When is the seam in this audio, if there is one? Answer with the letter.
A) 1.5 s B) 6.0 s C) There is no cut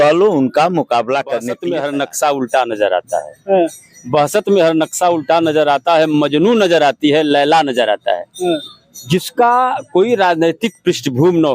A